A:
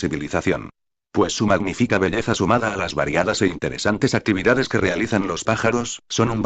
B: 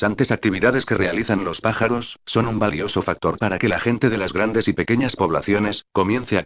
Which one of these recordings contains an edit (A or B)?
A